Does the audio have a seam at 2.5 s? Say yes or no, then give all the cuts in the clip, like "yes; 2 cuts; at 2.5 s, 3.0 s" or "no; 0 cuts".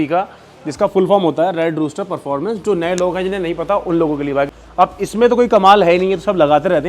no; 1 cut; at 4.5 s